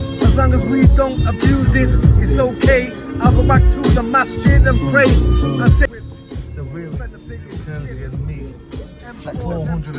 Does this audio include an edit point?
yes; 1 cut; at 5.9 s

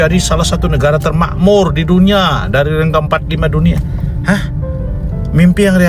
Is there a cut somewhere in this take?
no; 0 cuts

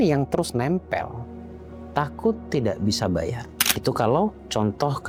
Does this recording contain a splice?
no; 0 cuts

